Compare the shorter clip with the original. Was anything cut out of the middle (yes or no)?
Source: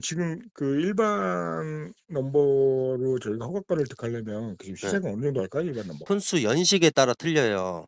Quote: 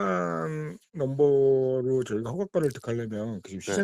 no